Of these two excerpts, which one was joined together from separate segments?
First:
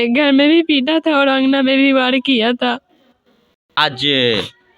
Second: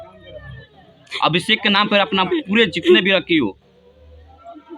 first; 1 cut; at 3.8 s

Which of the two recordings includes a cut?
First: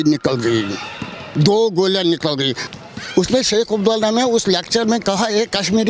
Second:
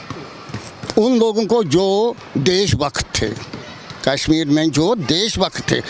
first; 1 cut; at 2.6 s

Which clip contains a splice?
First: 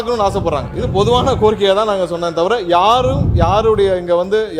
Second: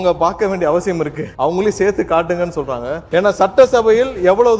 second; 2 cuts; at 1.2 s, 2.9 s

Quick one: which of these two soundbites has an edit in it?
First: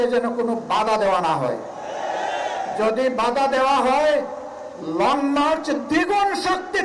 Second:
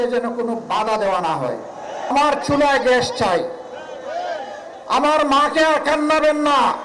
second; 1 cut; at 2.1 s

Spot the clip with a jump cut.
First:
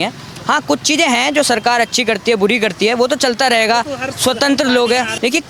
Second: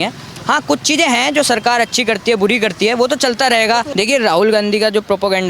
second; 1 cut; at 3.9 s

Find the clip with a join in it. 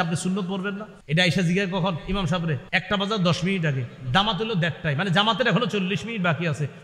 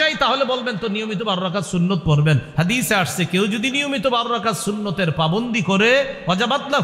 first; 2 cuts; at 0.9 s, 2.7 s

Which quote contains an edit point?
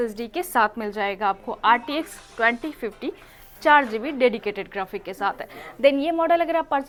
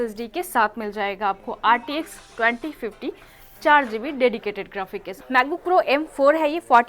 second; 1 cut; at 5.0 s

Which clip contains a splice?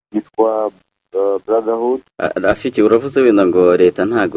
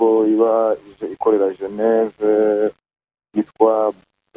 first; 1 cut; at 2.1 s

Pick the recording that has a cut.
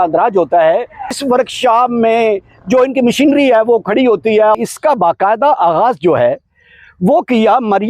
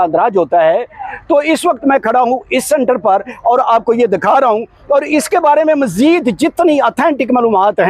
first; 2 cuts; at 1.2 s, 4.6 s

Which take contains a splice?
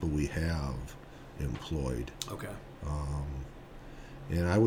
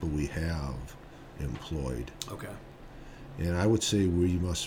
second; 1 cut; at 2.7 s

